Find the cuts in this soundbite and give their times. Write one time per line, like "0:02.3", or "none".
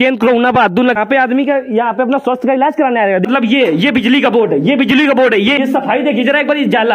0:01.0
0:03.2
0:05.6